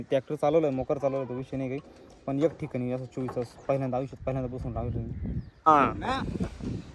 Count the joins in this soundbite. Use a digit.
1